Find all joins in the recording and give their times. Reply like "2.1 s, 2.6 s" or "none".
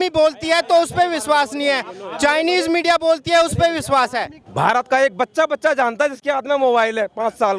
4.4 s